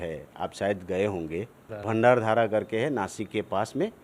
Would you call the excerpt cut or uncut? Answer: cut